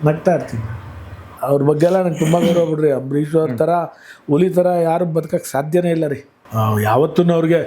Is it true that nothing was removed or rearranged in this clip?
no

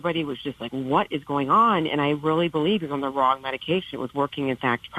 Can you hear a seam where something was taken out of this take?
no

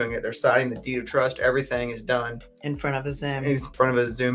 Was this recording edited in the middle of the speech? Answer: no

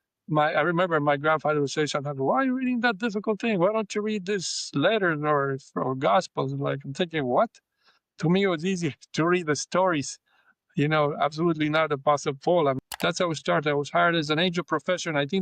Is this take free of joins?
no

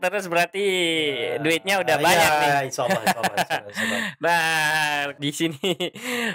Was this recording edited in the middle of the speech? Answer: yes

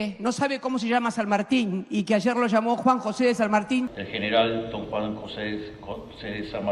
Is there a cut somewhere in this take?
no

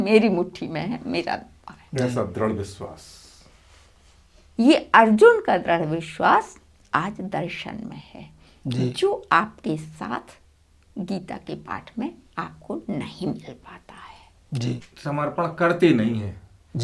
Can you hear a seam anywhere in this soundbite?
yes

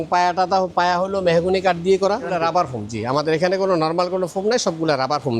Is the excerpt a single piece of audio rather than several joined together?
no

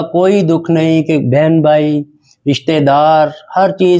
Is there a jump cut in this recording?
no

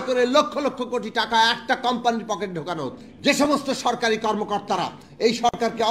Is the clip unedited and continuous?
no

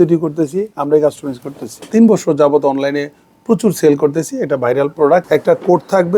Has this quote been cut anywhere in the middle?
yes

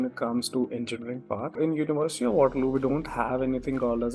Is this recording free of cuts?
no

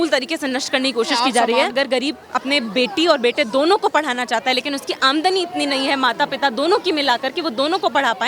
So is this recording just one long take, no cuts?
no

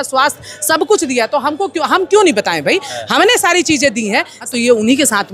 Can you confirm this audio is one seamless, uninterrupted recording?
no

